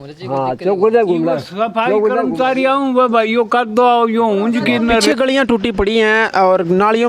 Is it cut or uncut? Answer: cut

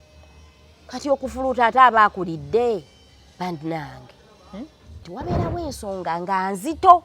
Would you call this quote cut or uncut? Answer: cut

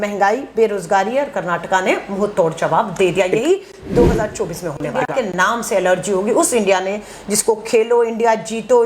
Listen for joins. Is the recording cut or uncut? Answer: cut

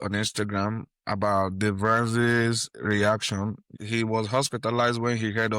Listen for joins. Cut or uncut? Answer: cut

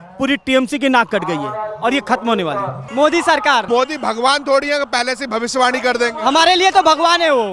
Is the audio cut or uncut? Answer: cut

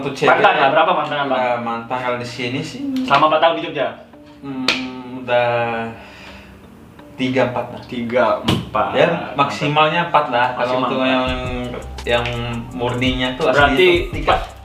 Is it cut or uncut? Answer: uncut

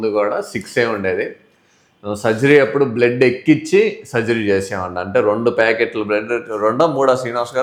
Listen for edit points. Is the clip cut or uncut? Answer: uncut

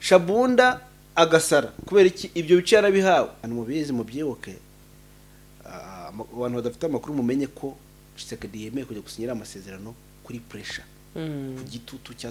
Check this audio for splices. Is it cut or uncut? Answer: cut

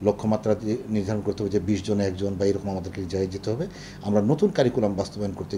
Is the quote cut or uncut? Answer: uncut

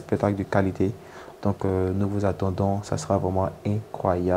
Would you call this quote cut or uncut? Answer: uncut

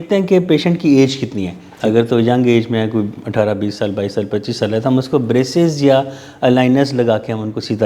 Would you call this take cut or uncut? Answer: uncut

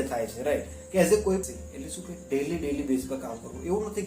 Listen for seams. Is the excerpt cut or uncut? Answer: cut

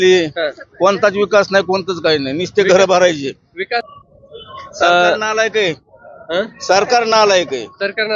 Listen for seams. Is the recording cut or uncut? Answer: cut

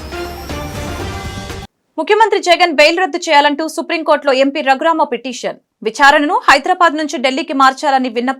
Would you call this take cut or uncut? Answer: cut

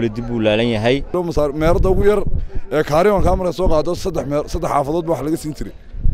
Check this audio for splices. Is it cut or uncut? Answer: cut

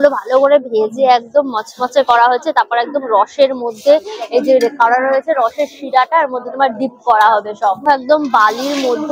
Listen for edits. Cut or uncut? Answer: uncut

